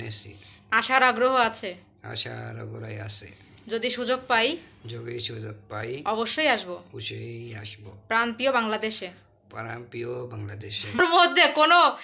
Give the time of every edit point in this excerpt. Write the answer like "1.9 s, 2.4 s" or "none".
11.0 s